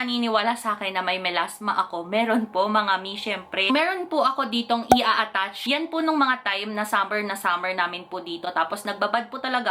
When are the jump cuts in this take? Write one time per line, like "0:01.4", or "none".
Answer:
none